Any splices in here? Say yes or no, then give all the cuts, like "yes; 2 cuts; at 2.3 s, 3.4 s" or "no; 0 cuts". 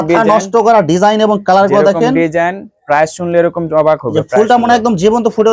no; 0 cuts